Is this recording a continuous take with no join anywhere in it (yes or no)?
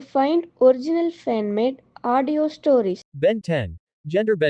no